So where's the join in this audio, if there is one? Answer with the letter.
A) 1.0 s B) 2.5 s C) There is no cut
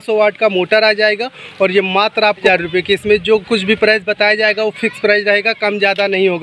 B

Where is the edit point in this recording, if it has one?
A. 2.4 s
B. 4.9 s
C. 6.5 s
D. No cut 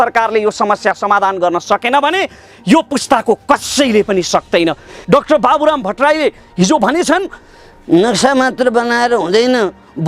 B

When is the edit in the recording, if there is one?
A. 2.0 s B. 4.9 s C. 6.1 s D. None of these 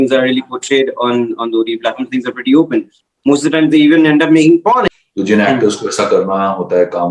B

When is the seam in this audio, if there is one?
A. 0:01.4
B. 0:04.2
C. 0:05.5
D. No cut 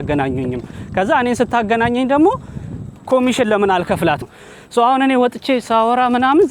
B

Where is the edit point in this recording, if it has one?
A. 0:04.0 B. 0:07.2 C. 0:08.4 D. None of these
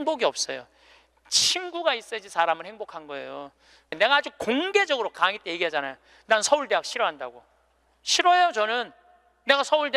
A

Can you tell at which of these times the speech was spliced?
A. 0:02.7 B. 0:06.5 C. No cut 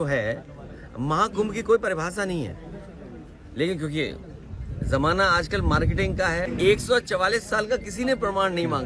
B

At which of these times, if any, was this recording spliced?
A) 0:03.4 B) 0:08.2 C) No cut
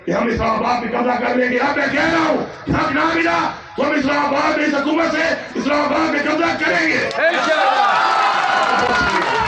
C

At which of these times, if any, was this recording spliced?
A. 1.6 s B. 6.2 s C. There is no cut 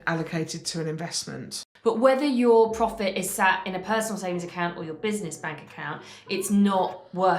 A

